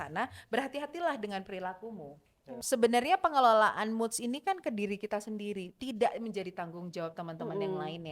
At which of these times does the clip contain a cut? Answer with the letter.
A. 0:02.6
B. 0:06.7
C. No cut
A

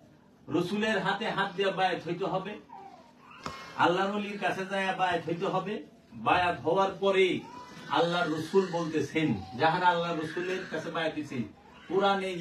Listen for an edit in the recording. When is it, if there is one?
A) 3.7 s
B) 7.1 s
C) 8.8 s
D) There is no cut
D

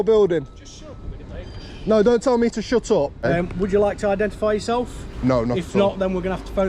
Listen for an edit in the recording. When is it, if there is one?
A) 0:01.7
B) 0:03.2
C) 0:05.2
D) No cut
B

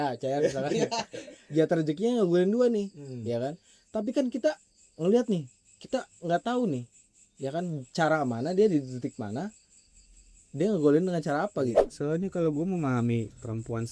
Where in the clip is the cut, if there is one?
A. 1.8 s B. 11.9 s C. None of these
B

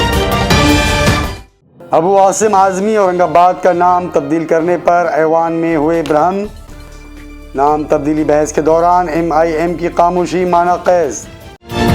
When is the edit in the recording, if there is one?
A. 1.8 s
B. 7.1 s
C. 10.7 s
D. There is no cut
A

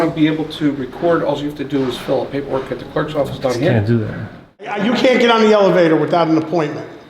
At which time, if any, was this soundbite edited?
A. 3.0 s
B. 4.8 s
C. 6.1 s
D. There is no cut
B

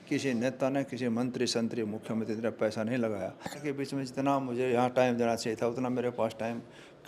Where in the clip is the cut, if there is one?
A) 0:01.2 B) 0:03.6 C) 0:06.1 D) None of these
B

